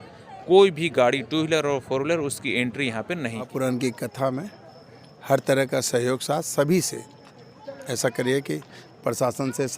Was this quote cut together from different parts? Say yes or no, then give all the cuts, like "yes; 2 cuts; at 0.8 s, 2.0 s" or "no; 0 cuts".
yes; 1 cut; at 3.5 s